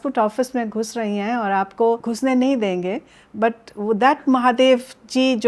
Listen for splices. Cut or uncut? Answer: cut